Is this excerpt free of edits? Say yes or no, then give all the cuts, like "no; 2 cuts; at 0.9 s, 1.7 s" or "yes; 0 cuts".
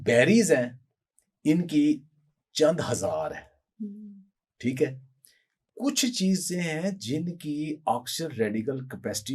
yes; 0 cuts